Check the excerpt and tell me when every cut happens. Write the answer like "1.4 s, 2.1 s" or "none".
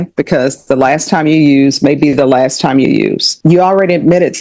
3.3 s

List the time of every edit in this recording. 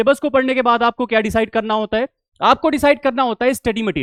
none

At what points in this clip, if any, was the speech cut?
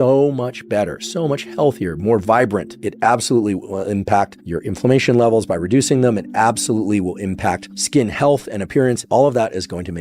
2.8 s, 7.7 s, 9.0 s

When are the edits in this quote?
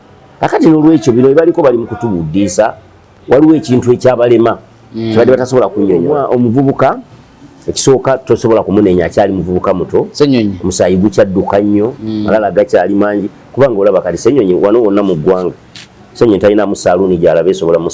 6.0 s

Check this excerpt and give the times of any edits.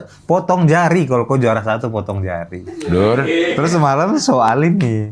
3.6 s

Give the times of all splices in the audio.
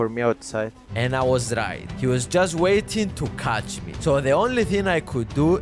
none

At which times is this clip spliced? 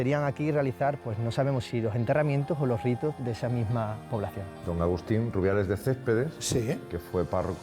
4.5 s

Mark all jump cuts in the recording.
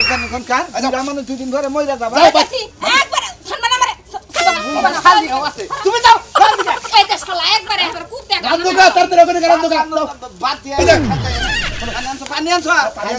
none

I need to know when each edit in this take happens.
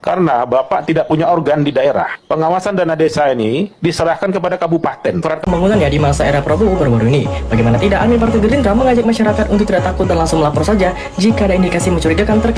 5.4 s

